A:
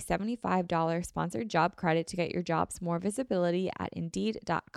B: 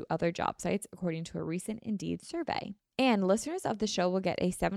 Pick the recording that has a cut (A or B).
B